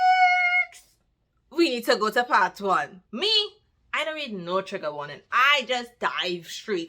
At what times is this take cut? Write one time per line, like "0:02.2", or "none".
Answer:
0:02.9